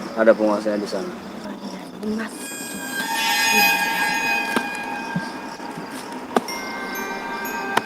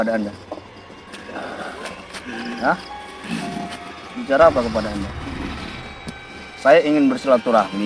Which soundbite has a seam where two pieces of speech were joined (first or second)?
first